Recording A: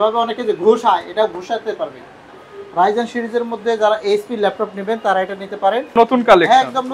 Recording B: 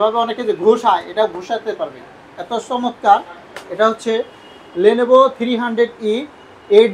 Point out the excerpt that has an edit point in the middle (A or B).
A